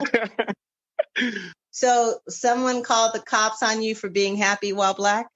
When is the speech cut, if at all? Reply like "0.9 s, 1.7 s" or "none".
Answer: 1.5 s